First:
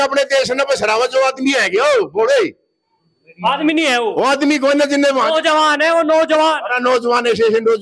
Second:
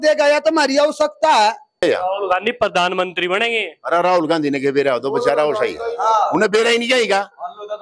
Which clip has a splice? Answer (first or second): second